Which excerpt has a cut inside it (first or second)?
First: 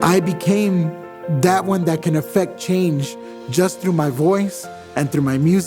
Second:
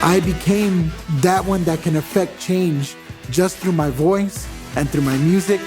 second